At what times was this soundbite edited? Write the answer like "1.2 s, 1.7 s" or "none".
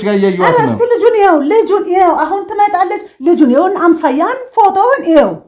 none

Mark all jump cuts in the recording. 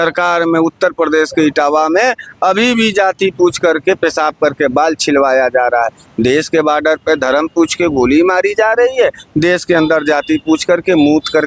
none

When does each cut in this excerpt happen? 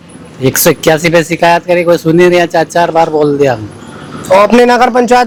none

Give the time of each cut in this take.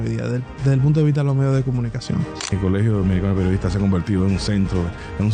2.6 s

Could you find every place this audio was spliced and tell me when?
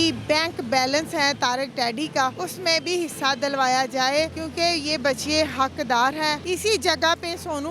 2.4 s, 4.4 s, 6.4 s

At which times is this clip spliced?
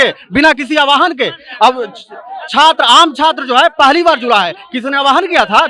none

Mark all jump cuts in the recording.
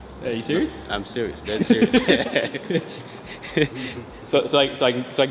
none

